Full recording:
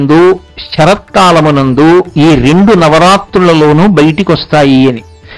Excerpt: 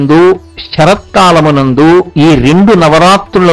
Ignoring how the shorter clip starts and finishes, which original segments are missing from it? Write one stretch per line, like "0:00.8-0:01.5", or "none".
none